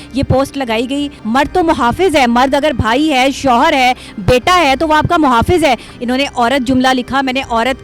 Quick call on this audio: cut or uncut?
cut